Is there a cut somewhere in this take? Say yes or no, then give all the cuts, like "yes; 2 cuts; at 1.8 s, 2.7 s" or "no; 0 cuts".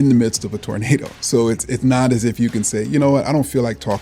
yes; 1 cut; at 1.1 s